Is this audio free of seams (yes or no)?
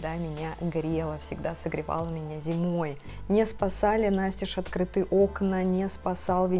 no